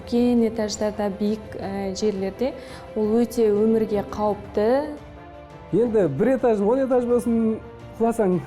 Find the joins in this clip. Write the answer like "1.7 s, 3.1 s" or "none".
5.1 s